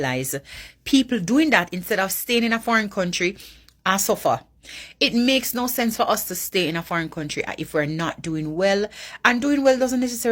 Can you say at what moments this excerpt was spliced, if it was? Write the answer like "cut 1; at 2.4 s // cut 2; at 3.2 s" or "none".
none